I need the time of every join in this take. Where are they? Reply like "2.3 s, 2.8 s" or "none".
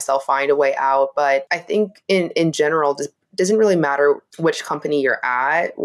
1.5 s, 4.3 s

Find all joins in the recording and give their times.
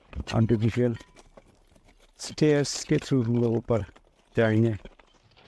none

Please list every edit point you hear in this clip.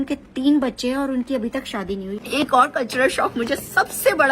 2.2 s

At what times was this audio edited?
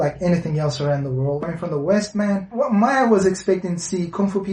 1.4 s, 2.5 s

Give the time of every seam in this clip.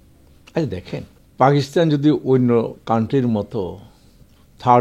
1.2 s

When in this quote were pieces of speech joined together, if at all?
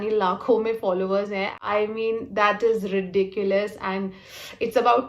1.6 s

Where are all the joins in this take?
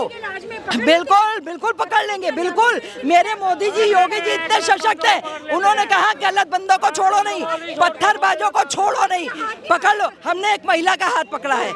none

